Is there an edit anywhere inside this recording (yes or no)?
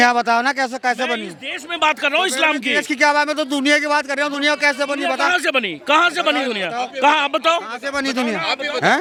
no